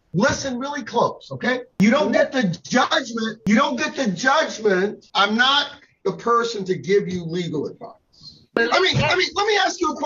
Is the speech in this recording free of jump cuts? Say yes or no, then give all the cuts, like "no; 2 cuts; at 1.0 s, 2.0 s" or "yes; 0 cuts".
no; 3 cuts; at 1.8 s, 5.0 s, 8.5 s